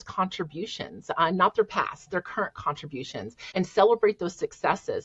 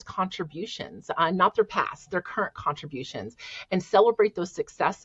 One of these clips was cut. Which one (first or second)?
first